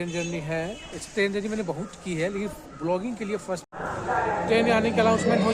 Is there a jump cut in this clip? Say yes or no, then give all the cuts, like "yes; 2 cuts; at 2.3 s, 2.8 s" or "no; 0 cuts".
yes; 1 cut; at 3.7 s